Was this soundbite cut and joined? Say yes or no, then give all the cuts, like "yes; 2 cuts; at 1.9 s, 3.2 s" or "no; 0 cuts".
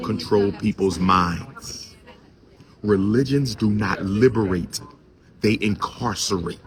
no; 0 cuts